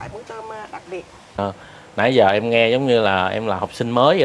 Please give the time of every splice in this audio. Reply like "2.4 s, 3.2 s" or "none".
1.4 s